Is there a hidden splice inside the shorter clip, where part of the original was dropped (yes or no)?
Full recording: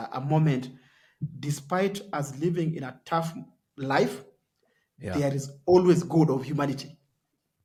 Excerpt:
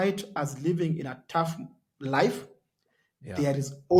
no